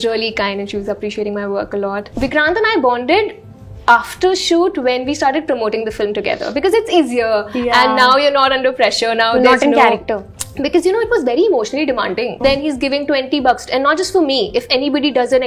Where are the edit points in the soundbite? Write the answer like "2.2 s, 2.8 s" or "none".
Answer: 2.1 s, 12.4 s